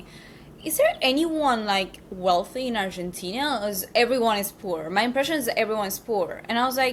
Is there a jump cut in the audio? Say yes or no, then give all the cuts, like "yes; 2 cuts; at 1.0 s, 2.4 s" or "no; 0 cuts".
no; 0 cuts